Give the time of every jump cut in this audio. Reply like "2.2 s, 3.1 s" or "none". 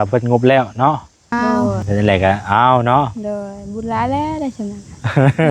1.3 s